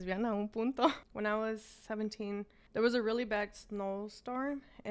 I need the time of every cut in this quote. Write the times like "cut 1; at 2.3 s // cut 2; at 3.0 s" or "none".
cut 1; at 1.1 s // cut 2; at 2.6 s